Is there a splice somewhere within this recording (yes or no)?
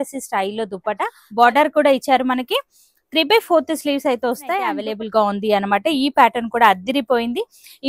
yes